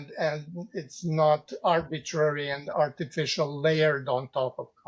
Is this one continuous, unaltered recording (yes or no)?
yes